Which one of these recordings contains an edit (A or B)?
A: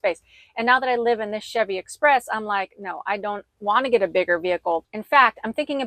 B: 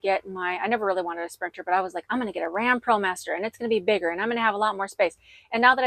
A